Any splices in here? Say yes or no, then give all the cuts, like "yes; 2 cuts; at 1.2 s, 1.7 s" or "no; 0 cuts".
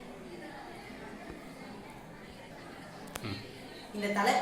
yes; 1 cut; at 2.6 s